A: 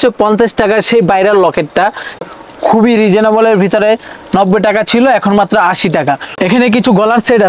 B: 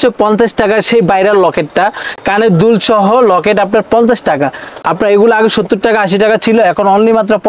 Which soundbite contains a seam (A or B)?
A